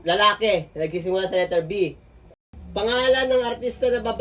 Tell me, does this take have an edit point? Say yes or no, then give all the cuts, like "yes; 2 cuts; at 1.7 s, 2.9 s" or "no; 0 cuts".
yes; 1 cut; at 2.2 s